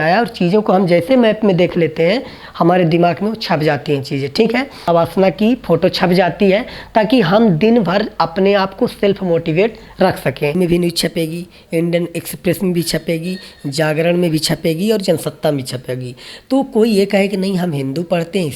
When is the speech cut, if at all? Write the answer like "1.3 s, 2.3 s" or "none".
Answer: 4.9 s, 10.6 s